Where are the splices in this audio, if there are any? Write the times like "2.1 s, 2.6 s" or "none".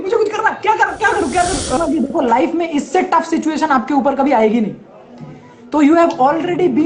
1.8 s